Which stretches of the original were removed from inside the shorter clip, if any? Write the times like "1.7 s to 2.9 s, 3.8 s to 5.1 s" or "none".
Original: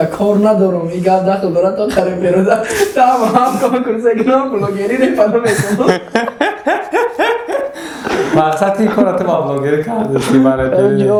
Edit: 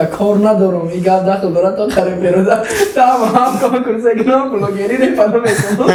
none